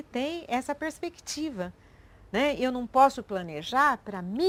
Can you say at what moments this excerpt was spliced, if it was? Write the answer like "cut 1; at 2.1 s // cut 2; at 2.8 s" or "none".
none